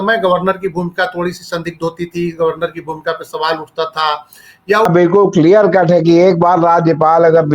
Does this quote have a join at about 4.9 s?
yes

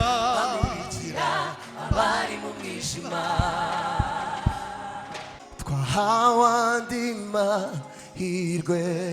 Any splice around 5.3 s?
yes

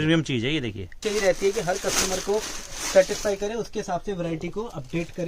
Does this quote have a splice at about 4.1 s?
no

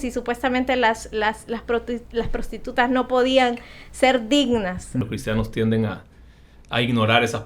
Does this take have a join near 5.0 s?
yes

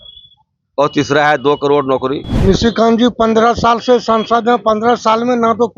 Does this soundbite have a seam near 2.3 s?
yes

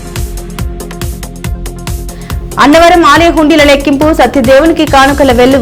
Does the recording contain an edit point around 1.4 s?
yes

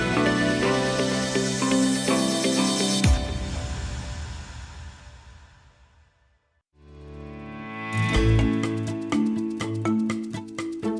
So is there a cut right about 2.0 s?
yes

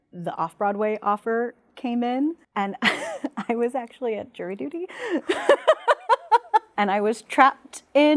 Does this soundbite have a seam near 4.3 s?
no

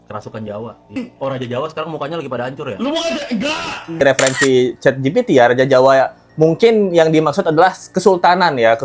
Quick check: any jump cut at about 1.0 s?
yes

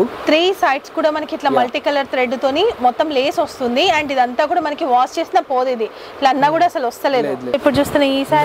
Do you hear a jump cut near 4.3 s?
no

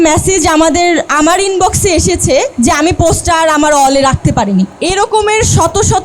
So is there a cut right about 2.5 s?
yes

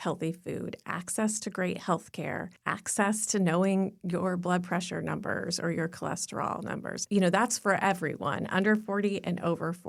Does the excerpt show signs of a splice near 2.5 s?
yes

